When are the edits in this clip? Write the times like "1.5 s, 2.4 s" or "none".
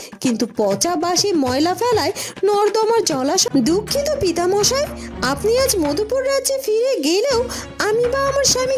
3.4 s